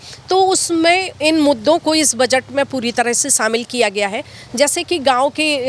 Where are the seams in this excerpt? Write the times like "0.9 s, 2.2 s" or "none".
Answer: none